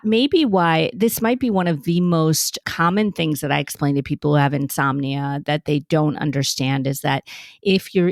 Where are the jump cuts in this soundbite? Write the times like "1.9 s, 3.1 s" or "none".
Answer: 2.6 s